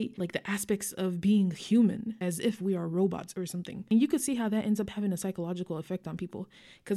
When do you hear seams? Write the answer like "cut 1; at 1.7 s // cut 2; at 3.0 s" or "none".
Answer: none